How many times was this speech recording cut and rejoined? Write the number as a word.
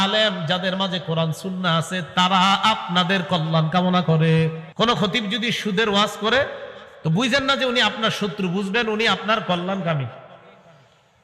one